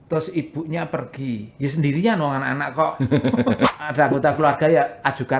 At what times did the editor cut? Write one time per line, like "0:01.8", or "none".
0:03.7